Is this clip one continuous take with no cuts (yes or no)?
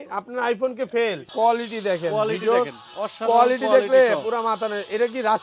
no